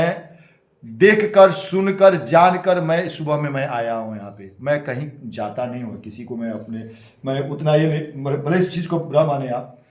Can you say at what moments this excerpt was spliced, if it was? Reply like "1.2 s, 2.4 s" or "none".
none